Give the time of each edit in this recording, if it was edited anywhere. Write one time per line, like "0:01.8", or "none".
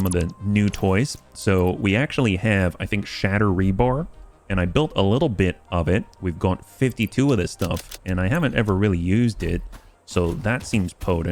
none